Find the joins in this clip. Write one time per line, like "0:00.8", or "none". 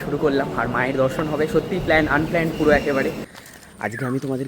0:03.3